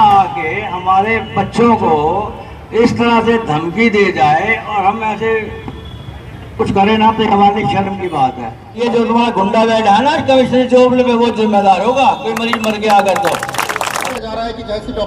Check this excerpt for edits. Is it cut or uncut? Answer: cut